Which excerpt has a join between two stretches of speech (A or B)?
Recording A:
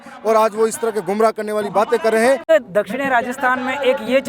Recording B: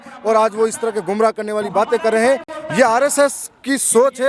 A